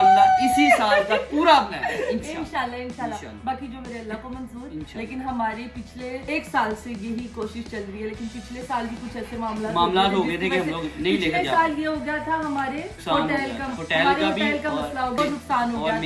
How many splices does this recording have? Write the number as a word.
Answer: zero